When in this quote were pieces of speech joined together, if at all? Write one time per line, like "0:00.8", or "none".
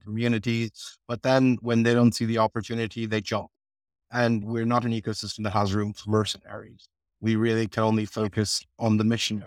none